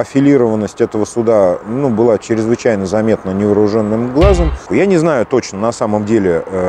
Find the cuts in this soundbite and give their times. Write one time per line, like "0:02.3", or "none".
0:04.7